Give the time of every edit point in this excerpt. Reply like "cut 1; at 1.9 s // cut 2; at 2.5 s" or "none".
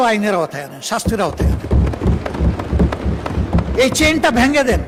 none